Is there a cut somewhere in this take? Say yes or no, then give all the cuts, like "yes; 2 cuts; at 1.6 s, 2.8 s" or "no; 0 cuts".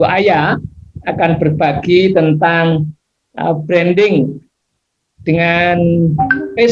no; 0 cuts